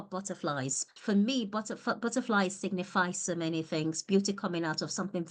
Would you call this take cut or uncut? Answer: cut